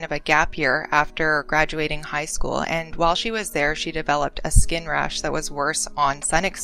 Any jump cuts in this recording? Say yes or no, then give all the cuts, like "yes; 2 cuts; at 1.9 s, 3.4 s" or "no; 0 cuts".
no; 0 cuts